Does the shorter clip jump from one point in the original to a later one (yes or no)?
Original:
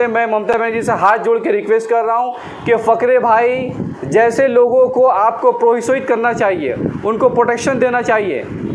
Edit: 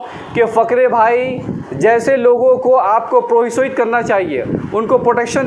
no